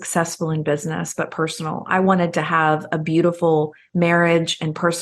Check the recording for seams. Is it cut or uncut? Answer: uncut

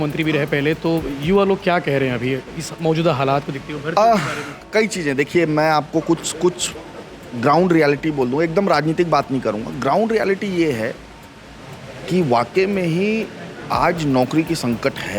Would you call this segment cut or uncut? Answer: uncut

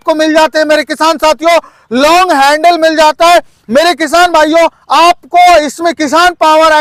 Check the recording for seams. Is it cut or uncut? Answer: uncut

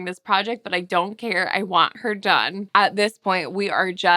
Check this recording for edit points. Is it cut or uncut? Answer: cut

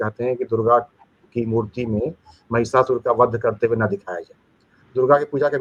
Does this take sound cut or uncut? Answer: uncut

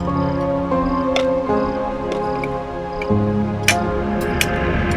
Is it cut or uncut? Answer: uncut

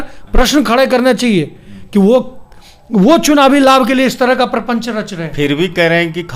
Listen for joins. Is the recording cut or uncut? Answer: uncut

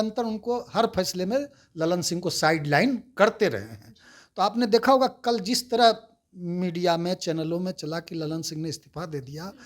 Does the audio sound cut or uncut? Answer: uncut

